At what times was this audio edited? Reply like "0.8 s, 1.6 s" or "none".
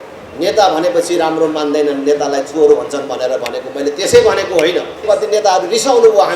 5.0 s